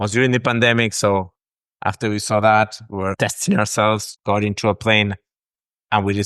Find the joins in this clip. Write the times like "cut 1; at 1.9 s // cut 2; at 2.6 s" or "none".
cut 1; at 3.1 s // cut 2; at 4.1 s

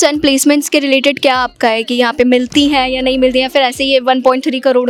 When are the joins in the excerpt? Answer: none

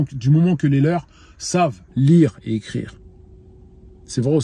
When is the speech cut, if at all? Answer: none

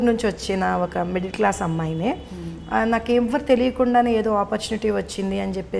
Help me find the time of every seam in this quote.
none

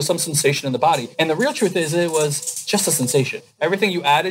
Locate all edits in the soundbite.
cut 1; at 1.1 s // cut 2; at 3.4 s

